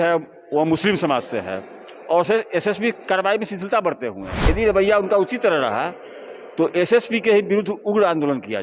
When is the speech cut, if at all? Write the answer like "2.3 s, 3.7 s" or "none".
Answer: 4.4 s